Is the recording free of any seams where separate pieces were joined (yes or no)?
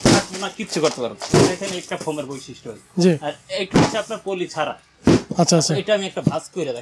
yes